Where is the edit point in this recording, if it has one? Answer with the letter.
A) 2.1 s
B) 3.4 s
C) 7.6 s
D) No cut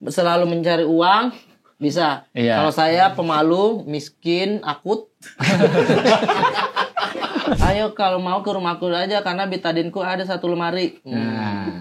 C